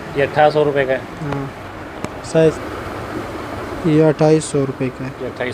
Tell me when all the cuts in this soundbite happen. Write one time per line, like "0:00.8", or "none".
0:02.6